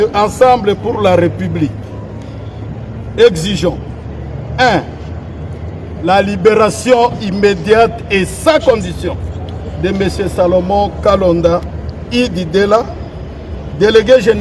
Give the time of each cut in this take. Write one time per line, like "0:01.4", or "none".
none